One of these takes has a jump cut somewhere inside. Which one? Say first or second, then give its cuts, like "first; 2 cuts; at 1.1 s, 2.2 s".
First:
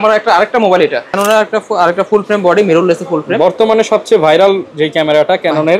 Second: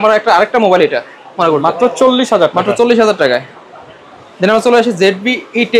first; 1 cut; at 1.1 s